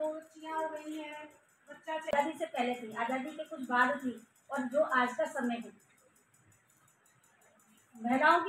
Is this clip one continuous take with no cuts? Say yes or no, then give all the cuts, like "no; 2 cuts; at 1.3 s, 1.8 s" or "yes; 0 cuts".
no; 1 cut; at 2.1 s